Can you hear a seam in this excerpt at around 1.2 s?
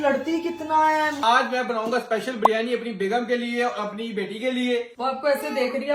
yes; 2 cuts; at 1.2 s, 5.0 s

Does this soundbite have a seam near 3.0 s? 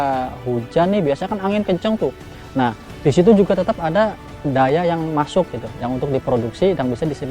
no; 1 cut; at 4.3 s

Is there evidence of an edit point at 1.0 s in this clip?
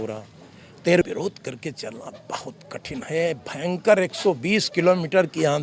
yes; 1 cut; at 1.0 s

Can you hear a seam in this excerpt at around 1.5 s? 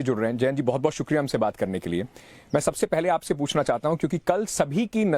no; 1 cut; at 3.8 s

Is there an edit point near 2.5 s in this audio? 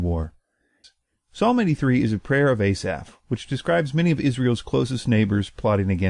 no; 1 cut; at 4.3 s

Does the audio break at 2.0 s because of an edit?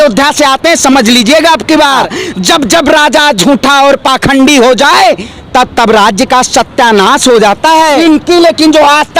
yes; 2 cuts; at 2.0 s, 7.9 s

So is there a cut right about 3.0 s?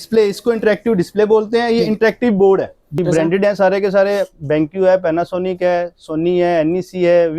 yes; 1 cut; at 3.0 s

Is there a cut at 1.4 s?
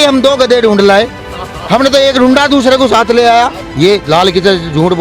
no; 1 cut; at 3.6 s

